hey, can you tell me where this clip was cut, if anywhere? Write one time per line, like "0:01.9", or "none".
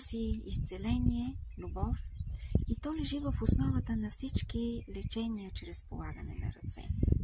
none